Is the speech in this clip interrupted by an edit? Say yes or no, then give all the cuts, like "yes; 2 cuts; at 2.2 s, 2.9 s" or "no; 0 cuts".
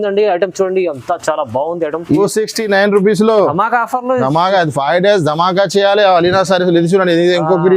yes; 1 cut; at 2.2 s